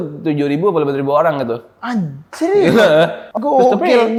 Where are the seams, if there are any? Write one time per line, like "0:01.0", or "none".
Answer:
none